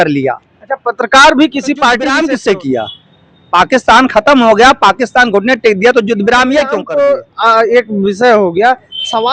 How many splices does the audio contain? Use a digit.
2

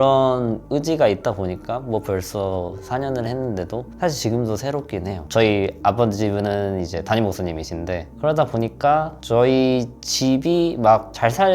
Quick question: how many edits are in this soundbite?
1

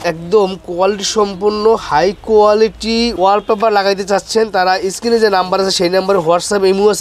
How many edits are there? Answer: 1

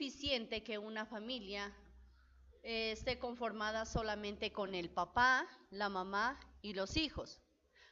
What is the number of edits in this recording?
0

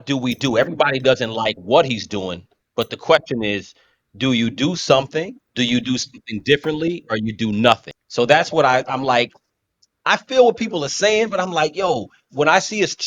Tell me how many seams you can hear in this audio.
2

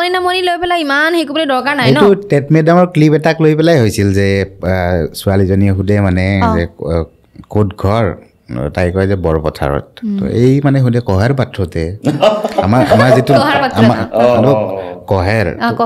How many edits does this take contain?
0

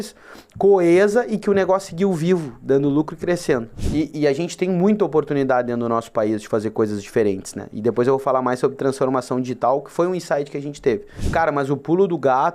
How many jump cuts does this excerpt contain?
2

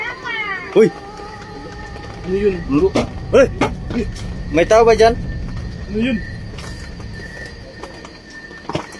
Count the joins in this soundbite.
0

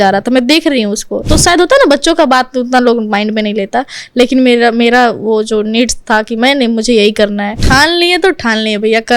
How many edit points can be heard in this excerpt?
2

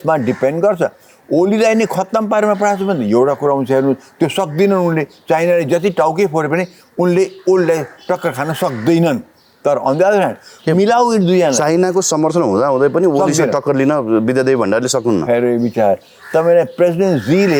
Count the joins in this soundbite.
0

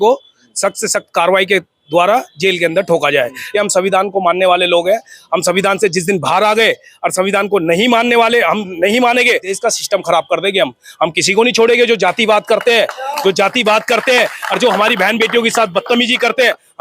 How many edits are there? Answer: 2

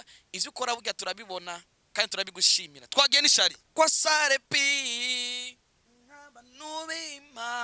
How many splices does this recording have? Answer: 0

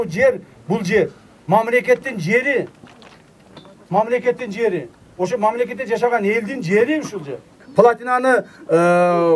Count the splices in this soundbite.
1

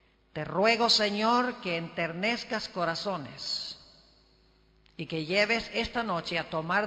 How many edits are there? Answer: 0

